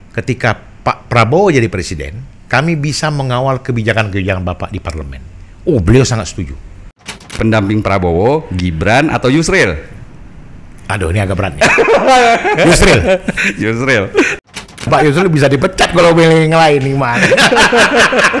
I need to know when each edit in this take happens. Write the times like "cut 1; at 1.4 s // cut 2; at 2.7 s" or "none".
cut 1; at 7.1 s // cut 2; at 14.7 s

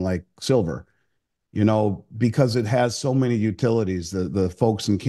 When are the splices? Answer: none

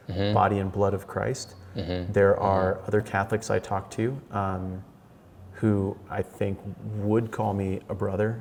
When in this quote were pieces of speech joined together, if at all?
none

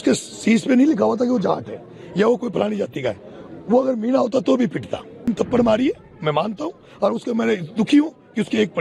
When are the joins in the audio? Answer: cut 1; at 5.3 s

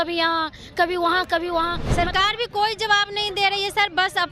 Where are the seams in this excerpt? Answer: cut 1; at 1.8 s

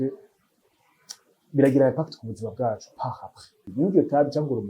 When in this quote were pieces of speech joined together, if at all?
cut 1; at 3.6 s

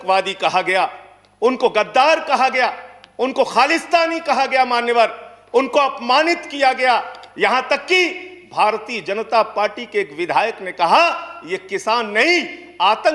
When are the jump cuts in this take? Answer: none

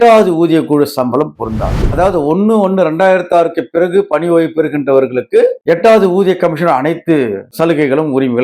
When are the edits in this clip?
cut 1; at 1.8 s

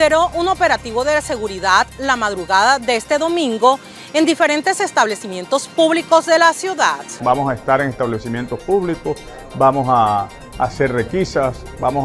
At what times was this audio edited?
cut 1; at 7.1 s

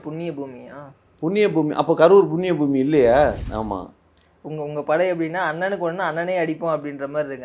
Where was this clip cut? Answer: cut 1; at 3.4 s

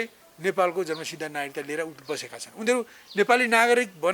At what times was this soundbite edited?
none

